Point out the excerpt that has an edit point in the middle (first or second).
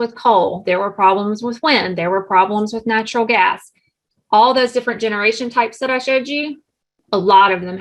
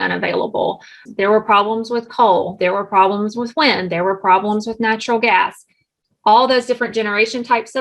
second